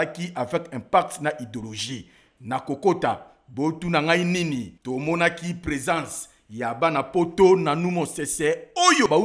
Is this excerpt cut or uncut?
uncut